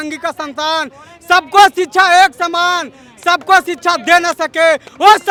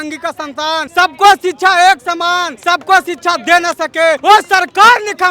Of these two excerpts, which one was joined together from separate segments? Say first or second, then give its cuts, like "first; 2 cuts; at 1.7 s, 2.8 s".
second; 3 cuts; at 0.9 s, 2.5 s, 4.2 s